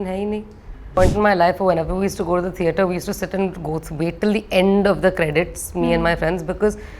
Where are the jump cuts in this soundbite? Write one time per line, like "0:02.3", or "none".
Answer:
0:00.9